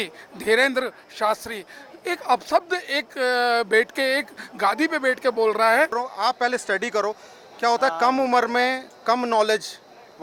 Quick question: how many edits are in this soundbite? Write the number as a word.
one